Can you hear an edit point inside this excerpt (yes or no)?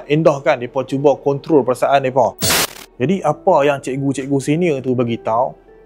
yes